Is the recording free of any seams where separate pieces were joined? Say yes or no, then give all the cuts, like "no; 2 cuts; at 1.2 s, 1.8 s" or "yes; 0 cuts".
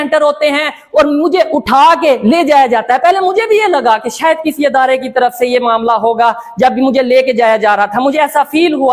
yes; 0 cuts